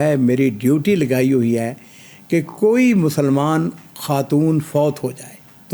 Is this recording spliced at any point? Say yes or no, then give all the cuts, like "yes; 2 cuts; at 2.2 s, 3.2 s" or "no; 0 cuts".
no; 0 cuts